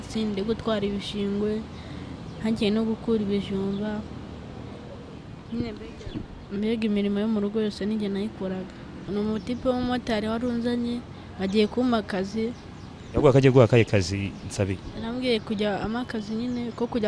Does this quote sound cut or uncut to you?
cut